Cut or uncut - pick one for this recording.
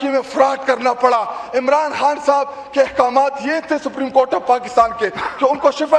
uncut